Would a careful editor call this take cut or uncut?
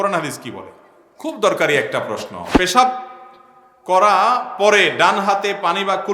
cut